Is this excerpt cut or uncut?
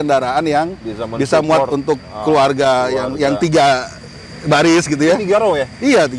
uncut